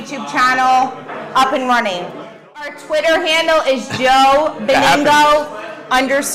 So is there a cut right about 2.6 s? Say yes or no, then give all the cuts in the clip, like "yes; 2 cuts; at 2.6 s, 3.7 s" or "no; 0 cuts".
yes; 1 cut; at 2.6 s